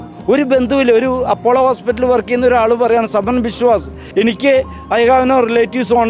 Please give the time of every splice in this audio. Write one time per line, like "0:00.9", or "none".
0:04.0